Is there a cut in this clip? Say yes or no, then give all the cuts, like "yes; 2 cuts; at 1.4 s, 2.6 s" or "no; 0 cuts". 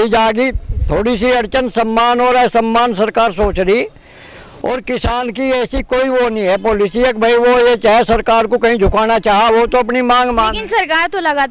no; 0 cuts